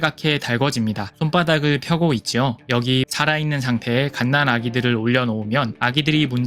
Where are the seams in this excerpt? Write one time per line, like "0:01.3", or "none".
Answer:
0:02.9